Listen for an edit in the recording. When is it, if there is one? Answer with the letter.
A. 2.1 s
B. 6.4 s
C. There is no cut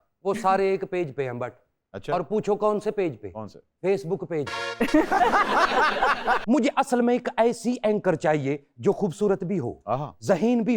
B